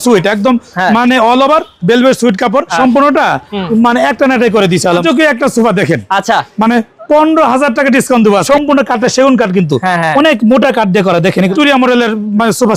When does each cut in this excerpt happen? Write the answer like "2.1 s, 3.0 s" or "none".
2.7 s, 5.0 s, 8.5 s, 11.5 s